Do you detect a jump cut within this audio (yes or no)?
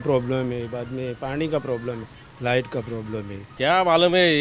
no